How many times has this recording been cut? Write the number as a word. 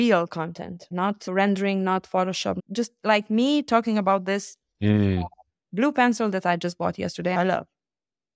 three